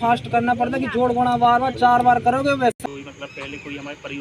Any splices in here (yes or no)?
yes